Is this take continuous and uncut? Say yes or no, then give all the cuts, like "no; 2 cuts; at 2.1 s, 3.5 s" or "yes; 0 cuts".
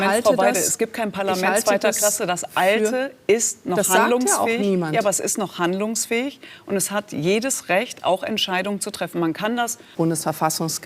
no; 1 cut; at 9.9 s